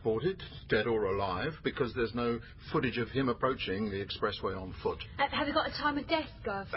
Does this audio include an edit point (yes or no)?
no